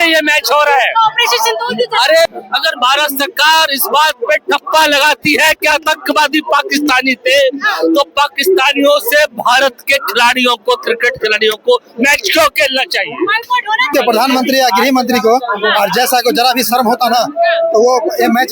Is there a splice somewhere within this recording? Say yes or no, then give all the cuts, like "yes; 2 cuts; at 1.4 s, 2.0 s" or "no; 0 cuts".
yes; 2 cuts; at 2.3 s, 13.9 s